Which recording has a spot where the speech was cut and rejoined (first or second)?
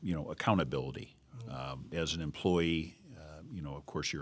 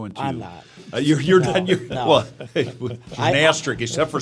first